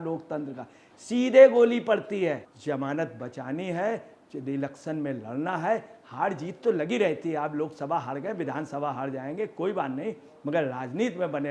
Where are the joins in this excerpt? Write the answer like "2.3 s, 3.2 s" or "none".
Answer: 2.5 s